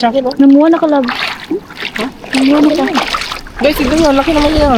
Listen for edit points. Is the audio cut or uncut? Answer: uncut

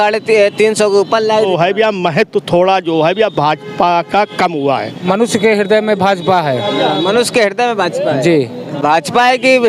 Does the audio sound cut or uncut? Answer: cut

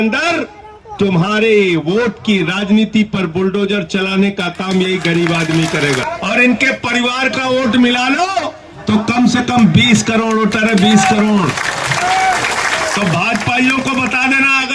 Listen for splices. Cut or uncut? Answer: cut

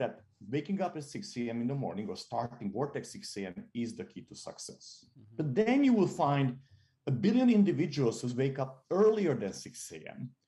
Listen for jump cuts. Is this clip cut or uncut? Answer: uncut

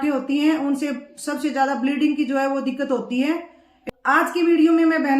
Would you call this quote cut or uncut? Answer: cut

